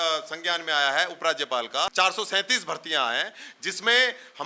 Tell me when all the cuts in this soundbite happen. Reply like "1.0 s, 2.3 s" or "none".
1.9 s